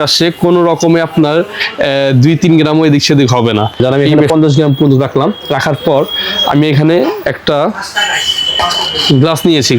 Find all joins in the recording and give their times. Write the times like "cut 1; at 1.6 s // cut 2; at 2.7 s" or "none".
cut 1; at 4.2 s

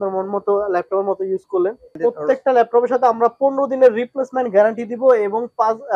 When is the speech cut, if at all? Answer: cut 1; at 1.9 s

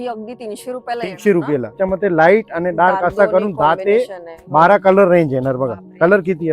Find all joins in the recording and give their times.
cut 1; at 1.8 s

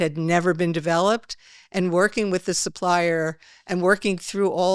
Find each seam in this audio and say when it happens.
none

